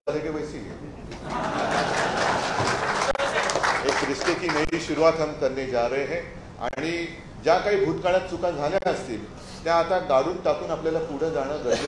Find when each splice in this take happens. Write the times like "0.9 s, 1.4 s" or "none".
3.4 s